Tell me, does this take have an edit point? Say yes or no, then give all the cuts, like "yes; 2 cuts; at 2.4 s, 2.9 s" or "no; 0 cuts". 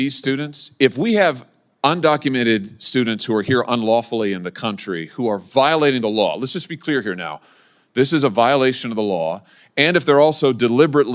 no; 0 cuts